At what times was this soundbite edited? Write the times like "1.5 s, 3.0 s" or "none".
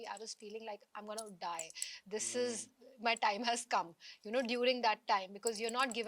none